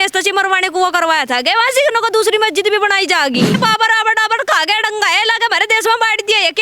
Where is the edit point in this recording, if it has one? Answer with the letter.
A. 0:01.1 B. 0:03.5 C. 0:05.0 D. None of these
B